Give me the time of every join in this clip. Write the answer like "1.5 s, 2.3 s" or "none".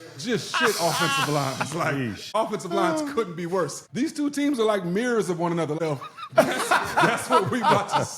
2.3 s, 3.8 s, 5.8 s